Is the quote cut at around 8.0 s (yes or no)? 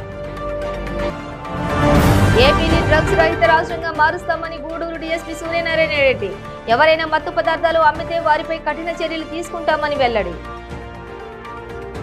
no